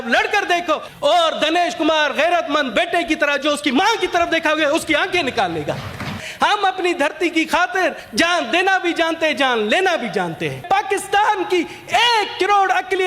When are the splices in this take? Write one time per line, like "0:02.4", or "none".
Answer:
0:00.9
0:06.2
0:08.0
0:10.6

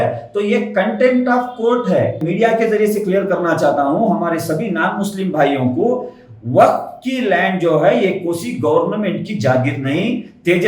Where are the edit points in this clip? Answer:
0:02.2

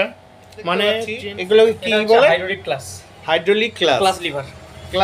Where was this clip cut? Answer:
0:01.1

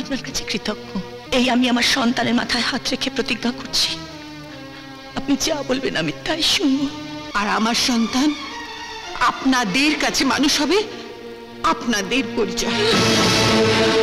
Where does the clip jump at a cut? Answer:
0:01.2
0:07.2

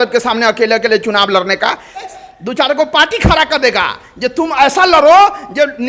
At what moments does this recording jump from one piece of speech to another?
0:02.1

